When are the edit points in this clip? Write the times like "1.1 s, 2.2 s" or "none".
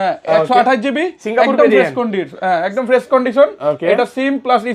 none